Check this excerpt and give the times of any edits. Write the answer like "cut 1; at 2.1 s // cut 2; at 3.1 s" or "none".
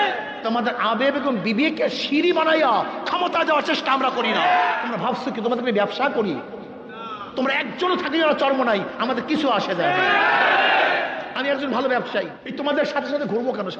cut 1; at 4.8 s // cut 2; at 12.4 s